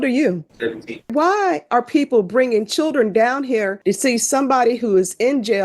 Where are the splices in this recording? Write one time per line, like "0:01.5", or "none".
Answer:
0:01.1
0:03.7